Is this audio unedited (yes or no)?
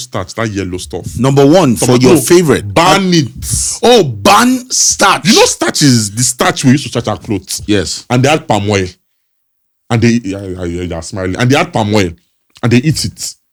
yes